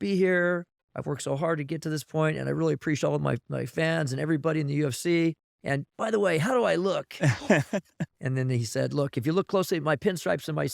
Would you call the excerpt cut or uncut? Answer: cut